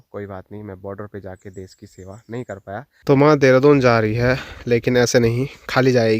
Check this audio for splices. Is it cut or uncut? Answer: cut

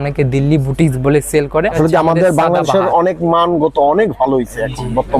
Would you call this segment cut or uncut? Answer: cut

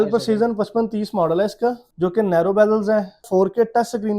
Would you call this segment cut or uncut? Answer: cut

